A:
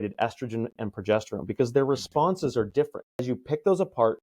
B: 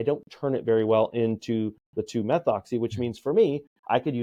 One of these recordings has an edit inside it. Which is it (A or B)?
A